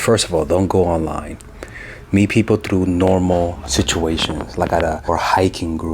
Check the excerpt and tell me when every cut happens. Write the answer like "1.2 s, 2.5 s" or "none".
5.0 s